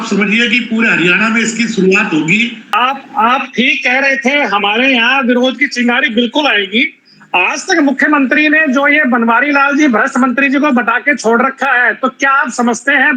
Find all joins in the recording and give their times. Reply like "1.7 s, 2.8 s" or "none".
2.6 s